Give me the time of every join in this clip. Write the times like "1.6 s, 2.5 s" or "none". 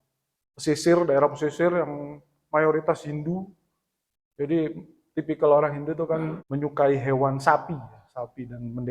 6.4 s